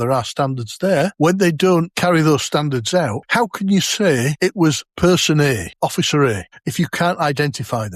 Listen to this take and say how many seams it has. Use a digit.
6